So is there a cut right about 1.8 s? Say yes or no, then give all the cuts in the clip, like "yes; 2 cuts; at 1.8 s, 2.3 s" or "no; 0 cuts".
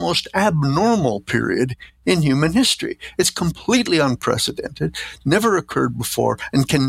no; 0 cuts